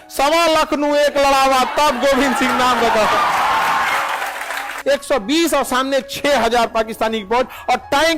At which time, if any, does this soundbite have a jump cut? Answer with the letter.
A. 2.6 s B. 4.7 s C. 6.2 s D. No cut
B